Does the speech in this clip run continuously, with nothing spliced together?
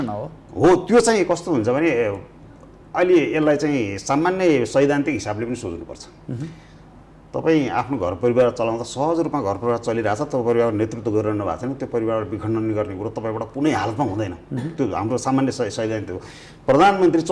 yes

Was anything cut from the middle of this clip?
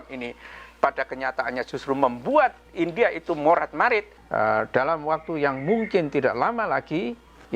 yes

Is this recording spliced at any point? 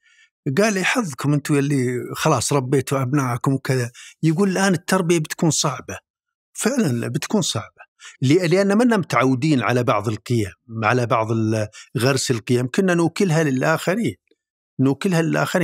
no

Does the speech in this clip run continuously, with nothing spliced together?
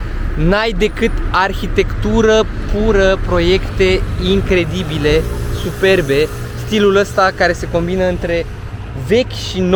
yes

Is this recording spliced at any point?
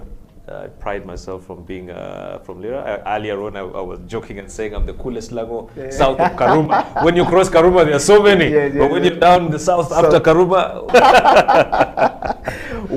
yes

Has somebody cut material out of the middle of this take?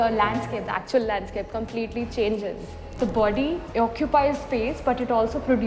yes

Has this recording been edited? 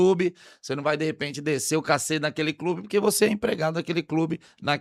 no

